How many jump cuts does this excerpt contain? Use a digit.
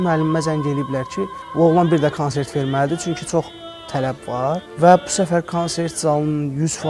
2